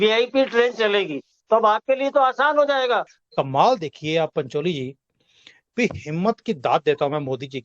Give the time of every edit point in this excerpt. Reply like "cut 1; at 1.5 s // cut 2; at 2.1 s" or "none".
cut 1; at 3.2 s